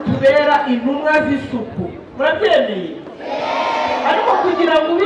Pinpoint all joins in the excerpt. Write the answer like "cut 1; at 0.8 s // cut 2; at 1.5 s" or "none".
none